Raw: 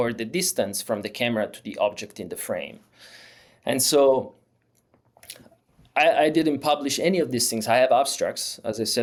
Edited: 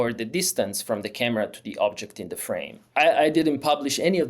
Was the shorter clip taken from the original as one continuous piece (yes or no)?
no